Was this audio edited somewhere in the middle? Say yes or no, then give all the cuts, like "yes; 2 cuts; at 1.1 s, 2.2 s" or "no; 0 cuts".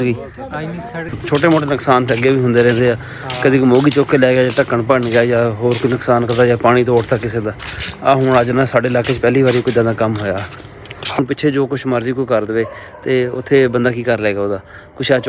yes; 2 cuts; at 1.1 s, 11.2 s